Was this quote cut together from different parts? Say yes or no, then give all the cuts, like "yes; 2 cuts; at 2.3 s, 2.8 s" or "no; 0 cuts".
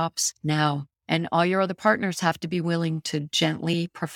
no; 0 cuts